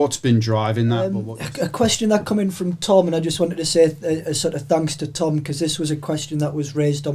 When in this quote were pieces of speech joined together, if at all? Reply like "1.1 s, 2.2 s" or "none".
1.4 s